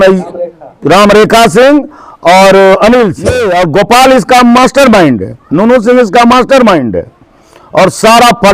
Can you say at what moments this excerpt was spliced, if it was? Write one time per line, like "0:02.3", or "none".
0:03.4